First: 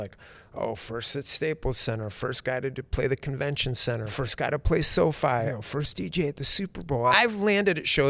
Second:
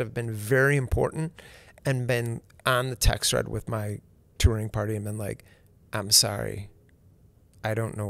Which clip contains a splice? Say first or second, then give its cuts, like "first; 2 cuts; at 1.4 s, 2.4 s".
first; 3 cuts; at 4.1 s, 5.6 s, 7.1 s